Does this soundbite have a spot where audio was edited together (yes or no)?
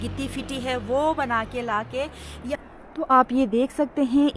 yes